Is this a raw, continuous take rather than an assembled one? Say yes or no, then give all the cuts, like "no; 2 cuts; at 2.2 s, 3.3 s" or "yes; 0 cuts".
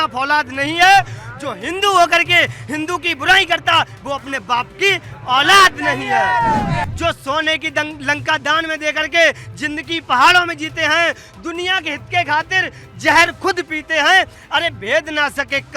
no; 1 cut; at 6.9 s